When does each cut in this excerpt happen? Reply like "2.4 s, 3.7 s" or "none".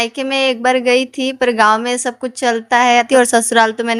3.1 s